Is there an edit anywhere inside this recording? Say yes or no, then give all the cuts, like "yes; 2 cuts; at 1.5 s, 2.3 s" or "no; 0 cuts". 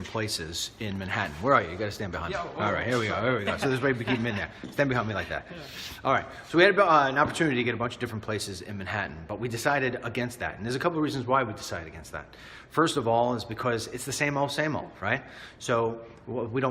yes; 1 cut; at 8.0 s